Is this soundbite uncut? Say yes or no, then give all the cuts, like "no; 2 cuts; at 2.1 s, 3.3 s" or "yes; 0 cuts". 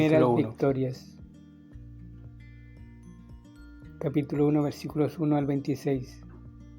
no; 2 cuts; at 0.9 s, 3.9 s